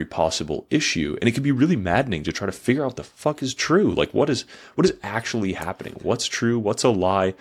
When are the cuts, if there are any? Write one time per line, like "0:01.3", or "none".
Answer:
none